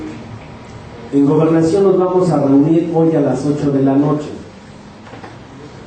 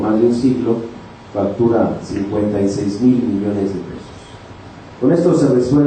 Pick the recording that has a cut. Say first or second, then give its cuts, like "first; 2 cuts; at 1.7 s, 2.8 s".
first; 1 cut; at 3.9 s